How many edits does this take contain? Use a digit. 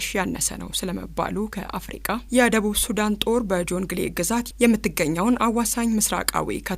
1